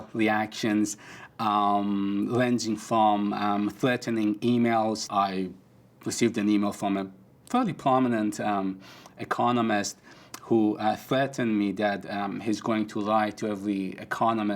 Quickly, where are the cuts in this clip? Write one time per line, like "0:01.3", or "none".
0:05.0